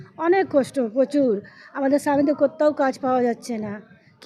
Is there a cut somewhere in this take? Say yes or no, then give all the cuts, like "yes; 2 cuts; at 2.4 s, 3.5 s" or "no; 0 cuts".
no; 0 cuts